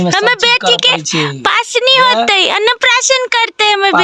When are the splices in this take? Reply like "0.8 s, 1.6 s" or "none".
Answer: none